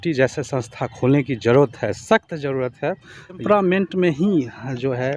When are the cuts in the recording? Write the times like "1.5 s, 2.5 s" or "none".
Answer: 3.4 s